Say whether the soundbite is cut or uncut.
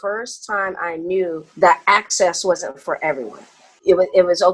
cut